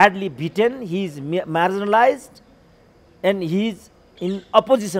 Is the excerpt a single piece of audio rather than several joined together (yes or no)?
yes